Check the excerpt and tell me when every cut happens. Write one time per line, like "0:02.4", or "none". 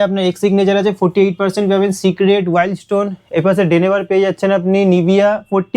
none